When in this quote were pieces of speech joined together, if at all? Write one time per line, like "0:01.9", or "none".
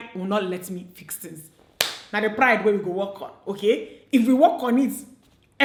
none